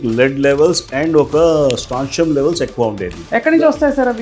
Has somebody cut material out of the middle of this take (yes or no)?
yes